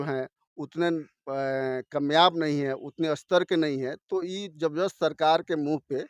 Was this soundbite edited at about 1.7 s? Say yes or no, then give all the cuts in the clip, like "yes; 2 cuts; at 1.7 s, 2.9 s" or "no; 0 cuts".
no; 0 cuts